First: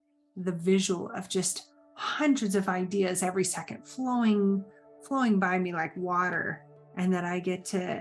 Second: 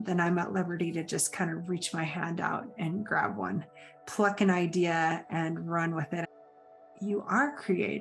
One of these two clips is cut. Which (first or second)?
second